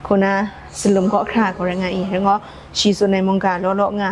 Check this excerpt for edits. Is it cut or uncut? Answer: uncut